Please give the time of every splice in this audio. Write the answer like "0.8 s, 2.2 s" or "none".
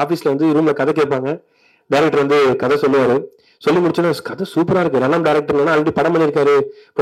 none